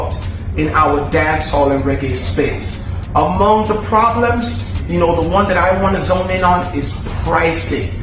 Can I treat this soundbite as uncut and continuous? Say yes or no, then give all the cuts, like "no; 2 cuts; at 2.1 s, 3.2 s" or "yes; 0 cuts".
yes; 0 cuts